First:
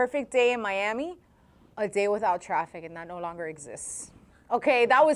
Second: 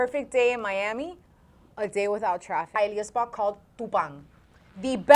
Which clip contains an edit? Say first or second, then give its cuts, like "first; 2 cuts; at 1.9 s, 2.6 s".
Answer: second; 1 cut; at 2.7 s